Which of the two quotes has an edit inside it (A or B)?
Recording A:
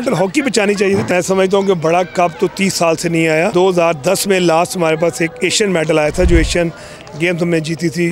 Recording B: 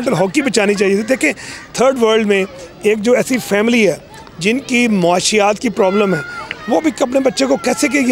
A